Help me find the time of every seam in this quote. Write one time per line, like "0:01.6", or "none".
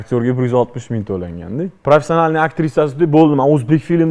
0:01.7

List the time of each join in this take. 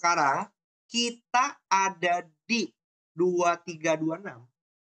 none

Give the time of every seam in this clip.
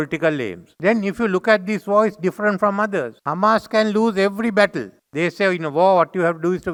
none

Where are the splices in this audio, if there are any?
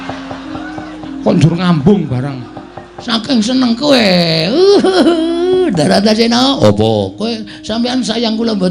none

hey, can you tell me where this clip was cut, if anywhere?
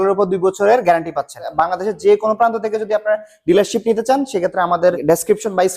0:01.4
0:05.0

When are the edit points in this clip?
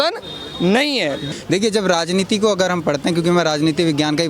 0:01.2

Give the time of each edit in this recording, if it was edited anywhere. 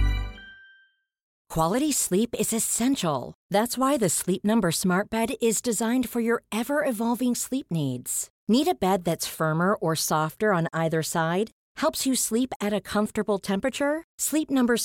0:01.4

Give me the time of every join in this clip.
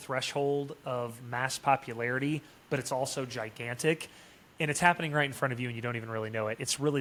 none

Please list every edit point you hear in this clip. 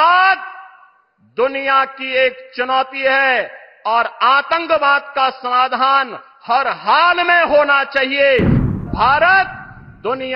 0:08.8

